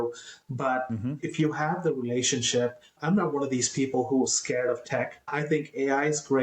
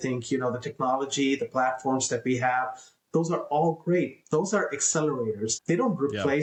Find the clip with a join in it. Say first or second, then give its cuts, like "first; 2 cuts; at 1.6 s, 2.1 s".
first; 1 cut; at 3.0 s